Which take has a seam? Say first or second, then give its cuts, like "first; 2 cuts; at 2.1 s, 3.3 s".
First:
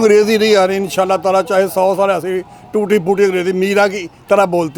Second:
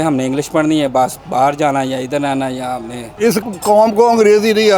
second; 1 cut; at 3.0 s